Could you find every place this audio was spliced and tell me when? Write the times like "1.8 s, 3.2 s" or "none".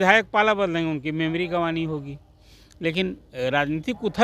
none